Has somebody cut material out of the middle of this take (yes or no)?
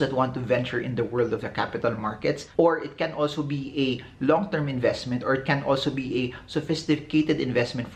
no